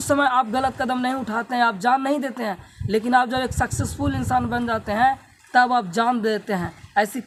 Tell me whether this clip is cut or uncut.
uncut